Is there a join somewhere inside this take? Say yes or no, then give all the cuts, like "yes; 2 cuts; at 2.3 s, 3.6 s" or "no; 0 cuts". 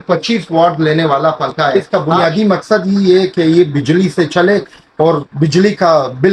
yes; 1 cut; at 1.8 s